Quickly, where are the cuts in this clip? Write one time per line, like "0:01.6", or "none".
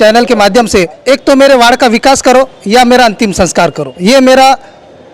0:00.9
0:03.9